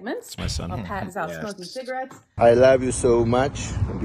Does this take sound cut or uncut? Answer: cut